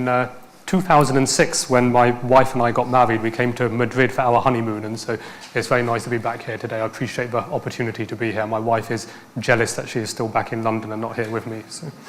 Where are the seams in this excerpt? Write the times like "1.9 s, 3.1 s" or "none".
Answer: none